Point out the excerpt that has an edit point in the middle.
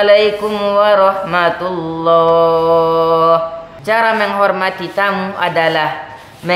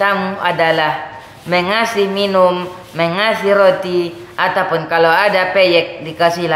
first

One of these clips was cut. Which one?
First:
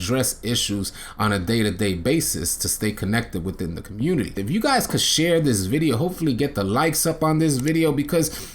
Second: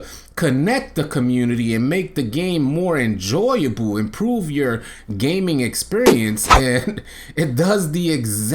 first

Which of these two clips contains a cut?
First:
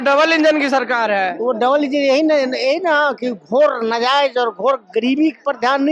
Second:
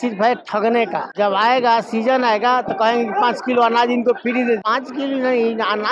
second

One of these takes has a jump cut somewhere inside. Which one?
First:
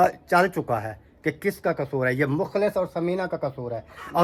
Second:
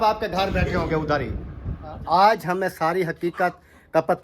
second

